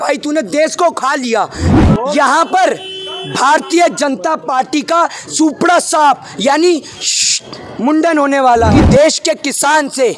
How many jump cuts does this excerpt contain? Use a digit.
2